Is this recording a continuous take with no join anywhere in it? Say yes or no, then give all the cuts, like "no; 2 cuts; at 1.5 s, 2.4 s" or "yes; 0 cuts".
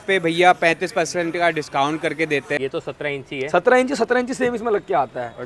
no; 1 cut; at 2.6 s